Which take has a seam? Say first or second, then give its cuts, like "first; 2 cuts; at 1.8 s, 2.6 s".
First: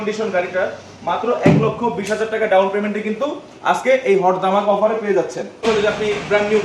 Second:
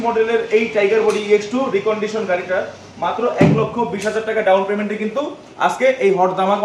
first; 1 cut; at 5.6 s